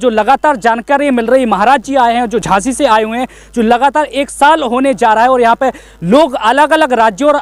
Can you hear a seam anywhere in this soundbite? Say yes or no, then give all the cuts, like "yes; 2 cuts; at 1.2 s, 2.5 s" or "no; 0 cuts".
no; 0 cuts